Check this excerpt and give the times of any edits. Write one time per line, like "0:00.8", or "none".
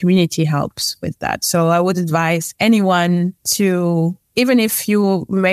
0:02.5
0:03.4
0:04.2